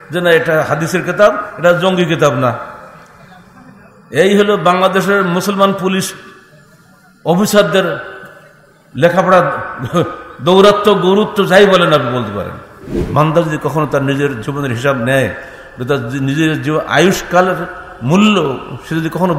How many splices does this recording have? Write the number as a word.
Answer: one